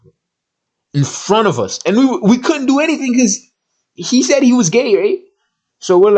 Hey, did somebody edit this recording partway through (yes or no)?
no